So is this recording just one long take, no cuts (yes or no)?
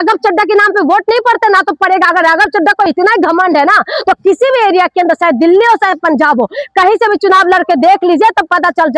yes